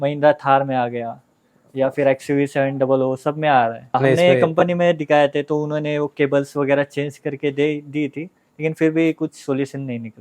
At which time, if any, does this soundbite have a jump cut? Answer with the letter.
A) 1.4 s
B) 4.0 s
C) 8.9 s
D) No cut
B